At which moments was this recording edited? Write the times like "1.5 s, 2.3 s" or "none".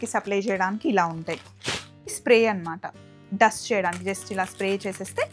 2.2 s

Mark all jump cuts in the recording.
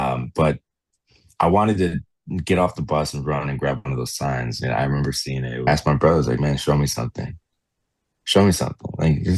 5.7 s

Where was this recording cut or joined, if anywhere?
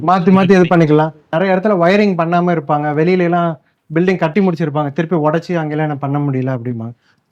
1.4 s

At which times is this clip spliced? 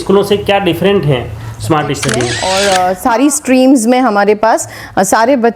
2.5 s

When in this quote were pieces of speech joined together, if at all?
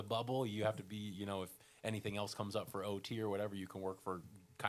none

